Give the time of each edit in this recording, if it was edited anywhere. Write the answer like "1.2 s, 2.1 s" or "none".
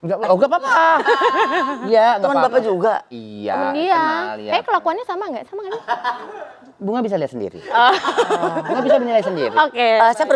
none